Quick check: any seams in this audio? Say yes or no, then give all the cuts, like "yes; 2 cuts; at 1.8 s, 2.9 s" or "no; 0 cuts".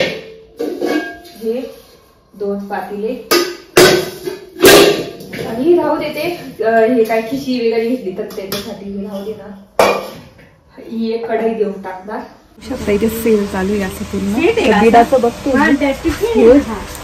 yes; 1 cut; at 12.6 s